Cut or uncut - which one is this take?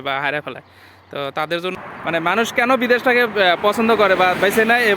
cut